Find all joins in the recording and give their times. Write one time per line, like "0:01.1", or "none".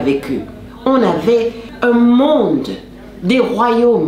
0:01.6